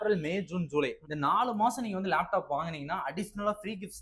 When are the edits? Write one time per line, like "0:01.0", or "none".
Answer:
0:01.0

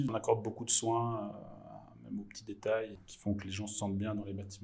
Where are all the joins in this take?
0:03.0

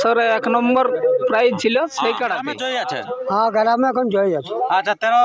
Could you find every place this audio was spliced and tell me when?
0:02.7

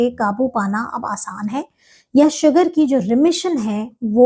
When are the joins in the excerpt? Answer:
none

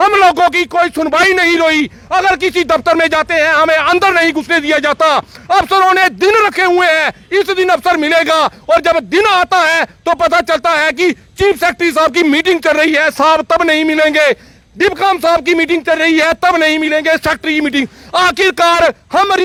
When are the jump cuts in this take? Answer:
none

